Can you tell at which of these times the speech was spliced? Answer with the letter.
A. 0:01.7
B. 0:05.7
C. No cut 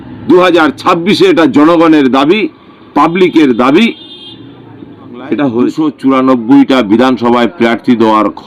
B